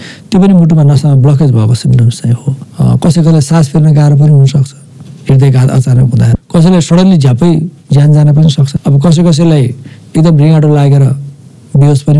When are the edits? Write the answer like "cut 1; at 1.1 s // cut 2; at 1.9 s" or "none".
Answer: cut 1; at 2.6 s // cut 2; at 6.3 s // cut 3; at 8.7 s